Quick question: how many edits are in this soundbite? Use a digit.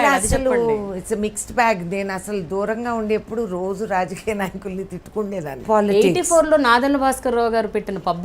1